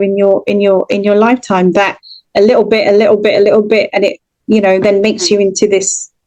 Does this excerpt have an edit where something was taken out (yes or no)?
no